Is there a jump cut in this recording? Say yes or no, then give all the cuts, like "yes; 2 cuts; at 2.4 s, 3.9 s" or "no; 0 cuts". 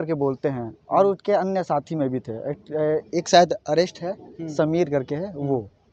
no; 0 cuts